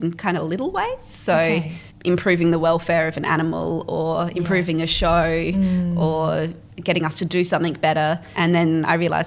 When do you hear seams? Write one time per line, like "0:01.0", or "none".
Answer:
none